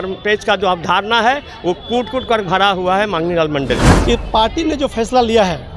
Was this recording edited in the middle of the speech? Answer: yes; 1 cut; at 3.9 s

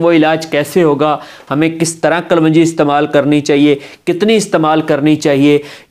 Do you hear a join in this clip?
no; 0 cuts

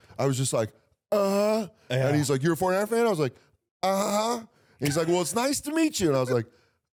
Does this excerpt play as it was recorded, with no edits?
yes; 0 cuts

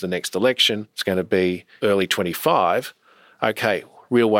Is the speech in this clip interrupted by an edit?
yes; 2 cuts; at 0.9 s, 1.7 s

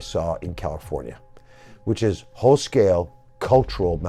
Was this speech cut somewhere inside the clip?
no; 0 cuts

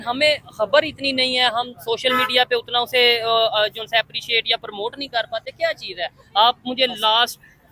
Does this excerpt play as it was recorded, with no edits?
yes; 0 cuts

